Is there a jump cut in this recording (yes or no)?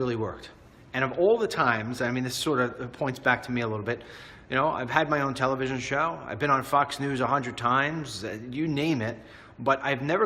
yes